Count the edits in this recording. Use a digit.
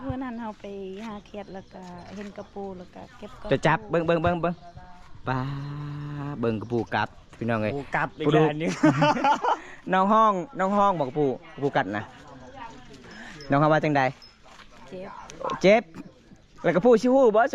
0